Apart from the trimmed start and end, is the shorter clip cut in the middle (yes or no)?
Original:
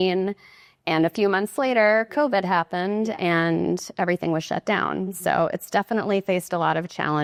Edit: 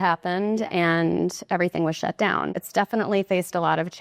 yes